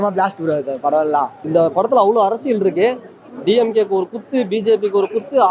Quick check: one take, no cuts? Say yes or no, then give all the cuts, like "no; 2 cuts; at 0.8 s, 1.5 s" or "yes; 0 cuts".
no; 1 cut; at 1.5 s